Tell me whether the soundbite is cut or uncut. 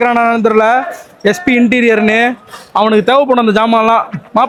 uncut